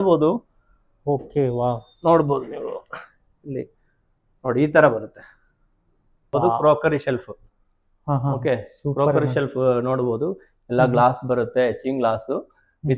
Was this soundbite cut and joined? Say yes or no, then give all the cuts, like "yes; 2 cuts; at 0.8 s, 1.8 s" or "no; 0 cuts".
yes; 1 cut; at 6.3 s